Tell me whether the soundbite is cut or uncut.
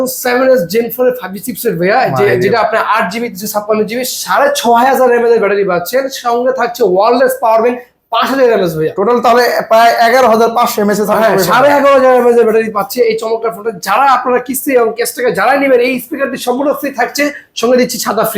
uncut